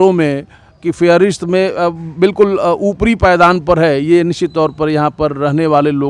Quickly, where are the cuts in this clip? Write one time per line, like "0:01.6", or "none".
none